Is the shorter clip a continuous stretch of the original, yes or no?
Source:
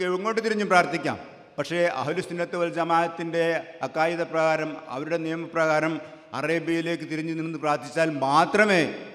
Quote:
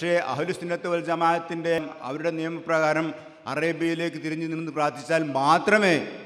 no